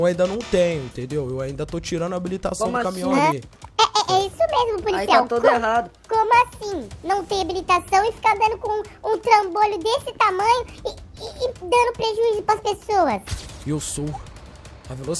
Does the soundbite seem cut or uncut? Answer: cut